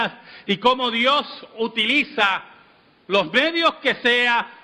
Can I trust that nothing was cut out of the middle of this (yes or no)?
no